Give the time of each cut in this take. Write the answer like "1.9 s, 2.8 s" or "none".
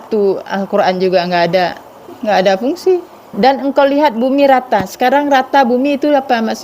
2.1 s, 3.3 s